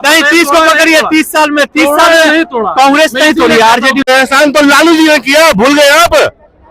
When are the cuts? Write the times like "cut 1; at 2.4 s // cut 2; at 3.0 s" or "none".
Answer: cut 1; at 4.0 s